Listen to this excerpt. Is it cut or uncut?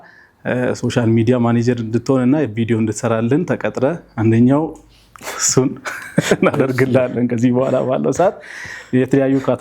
uncut